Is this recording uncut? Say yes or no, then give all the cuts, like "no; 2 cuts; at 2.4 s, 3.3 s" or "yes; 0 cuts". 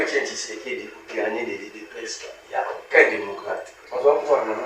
no; 1 cut; at 3.8 s